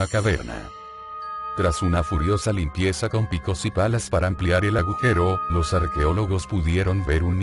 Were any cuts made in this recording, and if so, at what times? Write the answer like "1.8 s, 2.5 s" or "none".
3.2 s